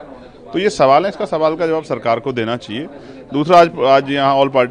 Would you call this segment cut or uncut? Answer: uncut